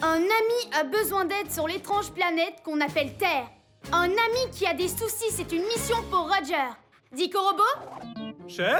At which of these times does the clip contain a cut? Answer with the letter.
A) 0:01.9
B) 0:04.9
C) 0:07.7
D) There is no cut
D